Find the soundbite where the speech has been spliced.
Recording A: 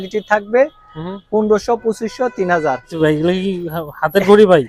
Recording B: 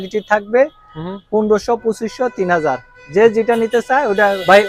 A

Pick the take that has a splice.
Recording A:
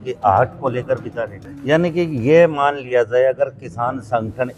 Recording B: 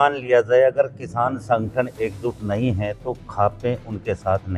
A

